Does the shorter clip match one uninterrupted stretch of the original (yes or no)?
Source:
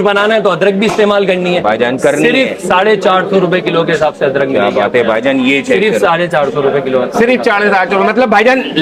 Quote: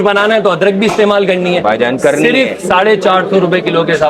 yes